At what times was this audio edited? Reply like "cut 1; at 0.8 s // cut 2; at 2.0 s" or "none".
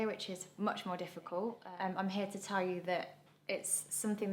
cut 1; at 1.6 s